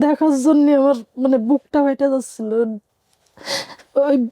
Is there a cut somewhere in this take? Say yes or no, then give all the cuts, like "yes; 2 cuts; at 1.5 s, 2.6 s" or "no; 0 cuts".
yes; 1 cut; at 2.8 s